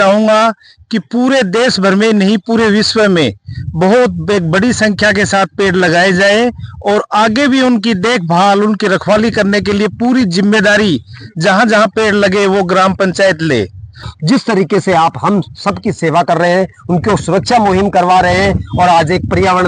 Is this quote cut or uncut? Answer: cut